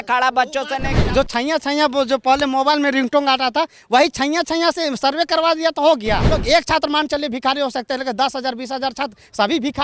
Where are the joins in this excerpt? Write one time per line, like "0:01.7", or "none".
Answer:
0:01.0
0:06.3